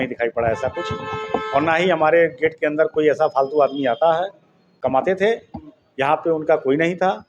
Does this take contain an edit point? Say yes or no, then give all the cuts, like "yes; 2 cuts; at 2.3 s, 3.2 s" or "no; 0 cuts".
yes; 1 cut; at 4.7 s